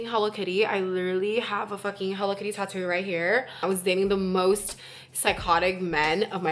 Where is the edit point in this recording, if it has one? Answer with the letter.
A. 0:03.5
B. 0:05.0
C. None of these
A